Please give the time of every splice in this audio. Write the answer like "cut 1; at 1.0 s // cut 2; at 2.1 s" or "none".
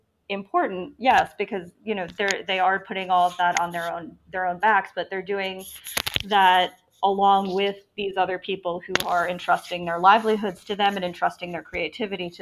none